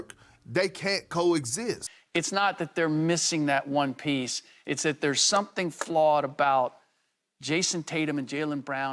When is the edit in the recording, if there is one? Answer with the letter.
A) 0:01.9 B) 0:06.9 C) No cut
A